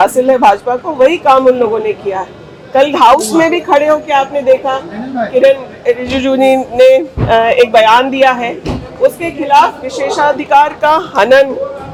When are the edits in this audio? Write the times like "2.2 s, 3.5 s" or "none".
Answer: none